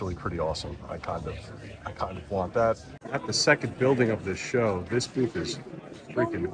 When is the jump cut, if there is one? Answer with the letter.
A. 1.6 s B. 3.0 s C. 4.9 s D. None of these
B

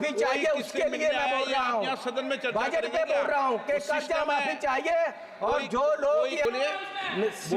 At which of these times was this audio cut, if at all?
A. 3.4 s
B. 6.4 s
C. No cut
B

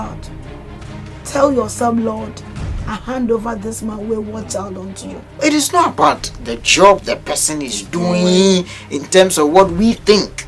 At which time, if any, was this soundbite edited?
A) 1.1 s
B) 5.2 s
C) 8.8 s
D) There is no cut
B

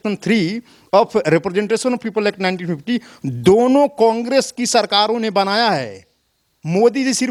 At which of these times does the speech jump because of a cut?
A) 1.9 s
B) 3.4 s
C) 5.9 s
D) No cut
D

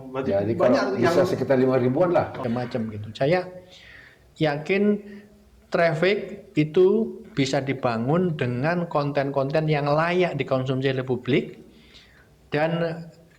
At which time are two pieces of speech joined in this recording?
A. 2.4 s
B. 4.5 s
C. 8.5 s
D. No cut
A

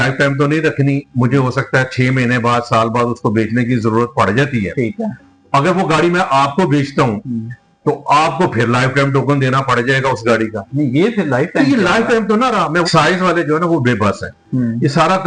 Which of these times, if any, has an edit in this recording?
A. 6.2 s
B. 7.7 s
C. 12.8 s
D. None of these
C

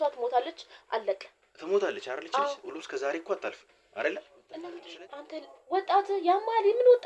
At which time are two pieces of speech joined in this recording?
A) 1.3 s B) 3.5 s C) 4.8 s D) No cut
C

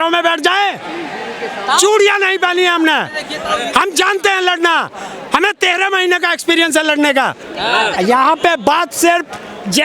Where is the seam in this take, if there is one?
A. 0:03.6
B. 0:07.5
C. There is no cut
B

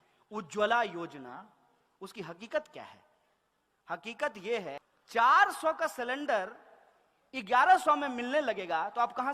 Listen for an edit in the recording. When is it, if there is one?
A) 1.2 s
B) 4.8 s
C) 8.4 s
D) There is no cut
B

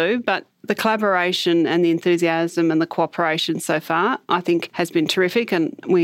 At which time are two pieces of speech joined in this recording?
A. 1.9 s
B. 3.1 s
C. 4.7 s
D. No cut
C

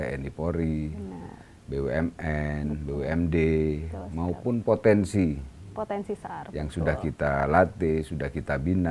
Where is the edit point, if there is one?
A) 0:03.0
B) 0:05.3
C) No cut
C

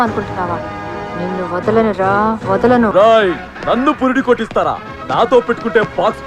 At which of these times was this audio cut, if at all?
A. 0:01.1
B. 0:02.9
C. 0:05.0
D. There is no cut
B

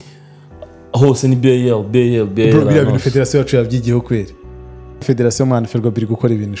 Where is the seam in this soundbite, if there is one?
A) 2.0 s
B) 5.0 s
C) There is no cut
B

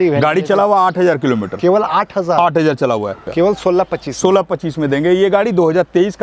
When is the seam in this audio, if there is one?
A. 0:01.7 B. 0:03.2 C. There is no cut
B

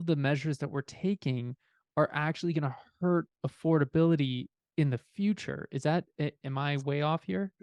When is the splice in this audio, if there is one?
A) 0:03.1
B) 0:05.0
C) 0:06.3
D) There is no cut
D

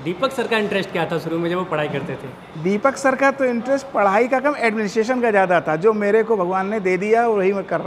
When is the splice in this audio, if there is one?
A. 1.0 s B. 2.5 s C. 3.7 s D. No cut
D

